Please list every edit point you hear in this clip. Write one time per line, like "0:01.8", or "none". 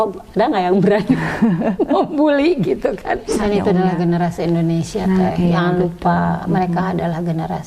0:03.3

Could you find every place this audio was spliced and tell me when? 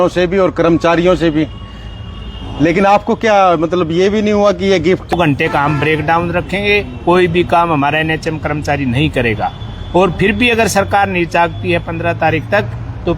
0:05.1

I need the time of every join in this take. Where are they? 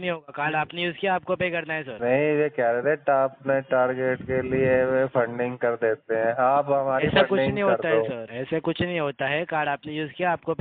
0:01.8
0:08.3

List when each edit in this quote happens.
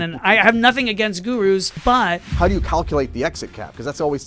0:01.9

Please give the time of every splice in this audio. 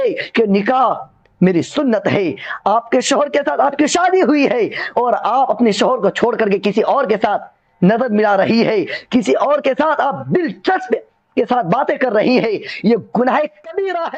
none

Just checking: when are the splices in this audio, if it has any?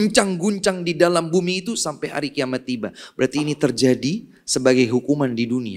none

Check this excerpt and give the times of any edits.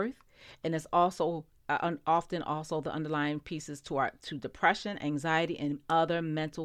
none

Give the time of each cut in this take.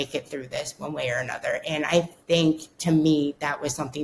none

